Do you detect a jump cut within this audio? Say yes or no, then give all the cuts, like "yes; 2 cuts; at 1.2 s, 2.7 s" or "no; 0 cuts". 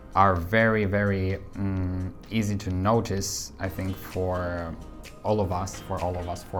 no; 0 cuts